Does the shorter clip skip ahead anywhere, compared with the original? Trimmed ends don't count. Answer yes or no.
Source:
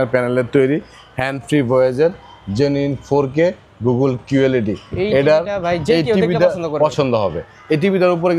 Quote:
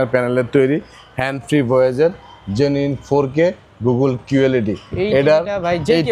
no